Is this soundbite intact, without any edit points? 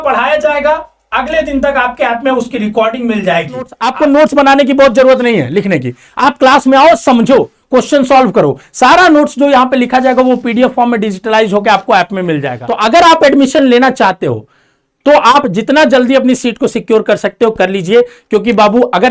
no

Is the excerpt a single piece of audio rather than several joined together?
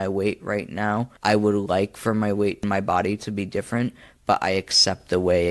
no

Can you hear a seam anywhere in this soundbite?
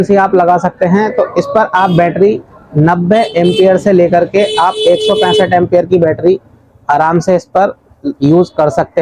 no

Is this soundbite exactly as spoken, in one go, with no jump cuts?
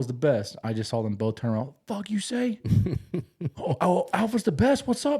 yes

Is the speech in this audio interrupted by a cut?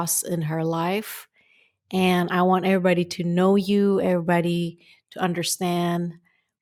no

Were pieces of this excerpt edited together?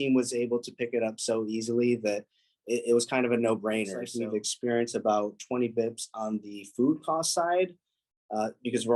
yes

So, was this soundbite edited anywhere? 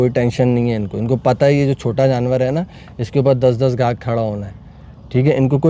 no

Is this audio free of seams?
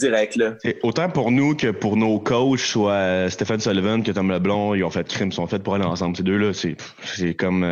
yes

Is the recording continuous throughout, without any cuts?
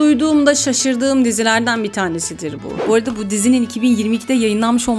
no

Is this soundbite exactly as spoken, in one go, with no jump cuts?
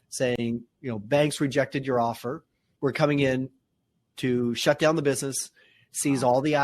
no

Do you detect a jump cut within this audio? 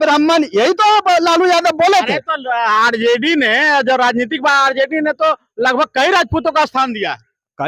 no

